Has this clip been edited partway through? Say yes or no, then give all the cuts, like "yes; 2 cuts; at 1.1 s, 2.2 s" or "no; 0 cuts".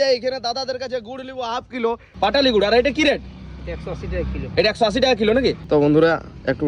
yes; 2 cuts; at 2.1 s, 5.6 s